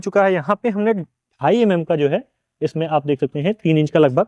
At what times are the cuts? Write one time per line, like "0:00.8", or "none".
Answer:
none